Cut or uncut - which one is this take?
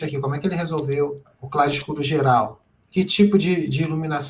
cut